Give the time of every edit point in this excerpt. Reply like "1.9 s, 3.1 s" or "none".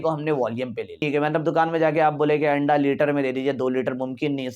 1.0 s